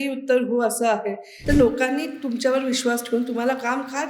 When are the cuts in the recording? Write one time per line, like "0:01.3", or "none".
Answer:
0:01.3